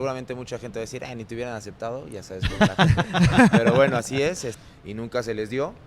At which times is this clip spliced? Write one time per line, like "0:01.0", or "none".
0:04.5